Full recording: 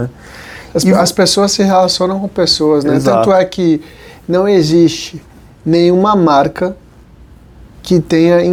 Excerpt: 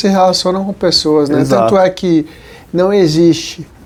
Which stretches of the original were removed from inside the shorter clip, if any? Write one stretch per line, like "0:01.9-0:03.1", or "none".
none

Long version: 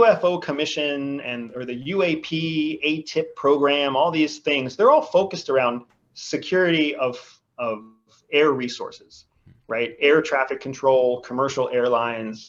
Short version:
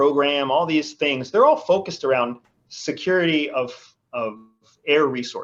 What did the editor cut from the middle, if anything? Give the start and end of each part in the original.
none

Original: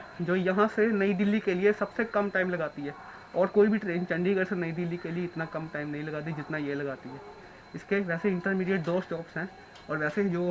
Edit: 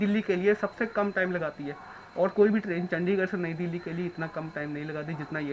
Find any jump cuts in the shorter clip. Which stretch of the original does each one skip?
none

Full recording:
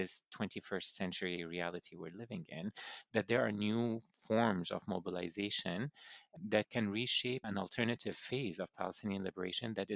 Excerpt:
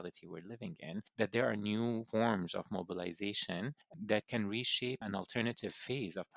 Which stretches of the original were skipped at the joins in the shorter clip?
0:02.8-0:03.0
0:04.0-0:04.2
0:06.0-0:06.3

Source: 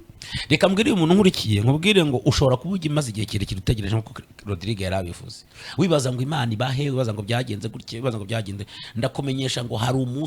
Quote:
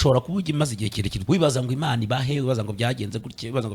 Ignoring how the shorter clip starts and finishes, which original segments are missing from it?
0:03.5-0:05.6

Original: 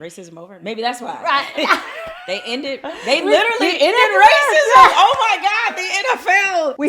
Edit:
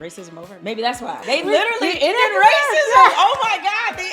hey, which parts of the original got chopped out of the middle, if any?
0:01.2-0:03.0

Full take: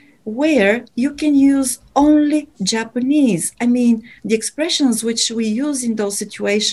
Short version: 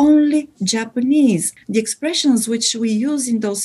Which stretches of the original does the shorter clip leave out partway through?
0:03.5-0:04.1

